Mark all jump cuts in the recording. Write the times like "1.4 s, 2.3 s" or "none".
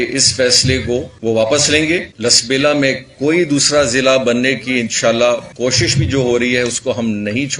1.1 s, 2.1 s, 5.5 s